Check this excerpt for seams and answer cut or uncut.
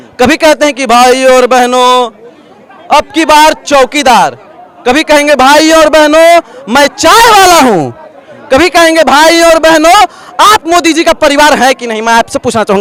uncut